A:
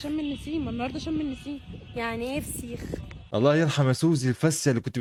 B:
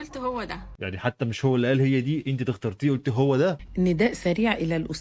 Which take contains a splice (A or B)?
B